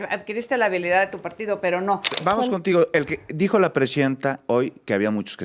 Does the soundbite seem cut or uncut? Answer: cut